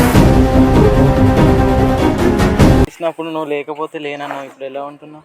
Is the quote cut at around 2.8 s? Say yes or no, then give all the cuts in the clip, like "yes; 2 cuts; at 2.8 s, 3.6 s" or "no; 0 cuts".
yes; 1 cut; at 2.8 s